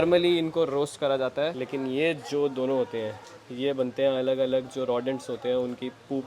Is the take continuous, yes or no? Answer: no